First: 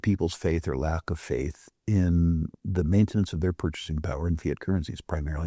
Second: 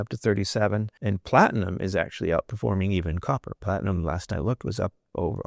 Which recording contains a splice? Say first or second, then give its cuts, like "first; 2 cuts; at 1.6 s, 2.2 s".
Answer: second; 1 cut; at 0.9 s